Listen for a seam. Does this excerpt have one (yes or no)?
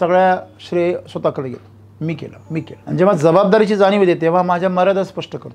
yes